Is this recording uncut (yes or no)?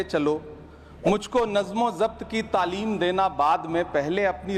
yes